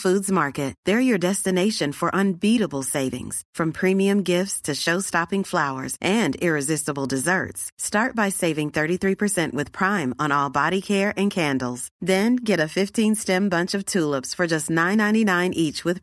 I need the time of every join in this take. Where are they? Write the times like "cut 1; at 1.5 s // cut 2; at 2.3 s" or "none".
none